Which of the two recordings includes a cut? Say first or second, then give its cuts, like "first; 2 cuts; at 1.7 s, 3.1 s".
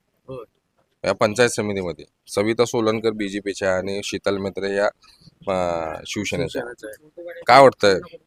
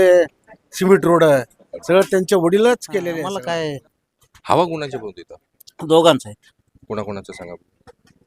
second; 1 cut; at 3.2 s